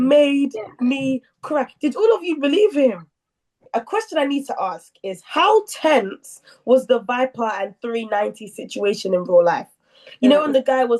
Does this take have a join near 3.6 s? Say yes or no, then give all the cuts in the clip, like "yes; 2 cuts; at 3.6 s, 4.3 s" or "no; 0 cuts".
yes; 1 cut; at 3.6 s